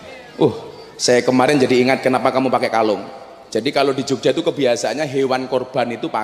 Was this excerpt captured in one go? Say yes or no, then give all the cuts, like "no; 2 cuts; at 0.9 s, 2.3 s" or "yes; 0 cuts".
yes; 0 cuts